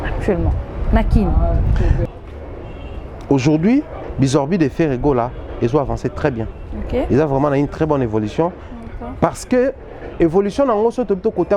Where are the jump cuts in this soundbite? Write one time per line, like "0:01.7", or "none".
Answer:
0:02.0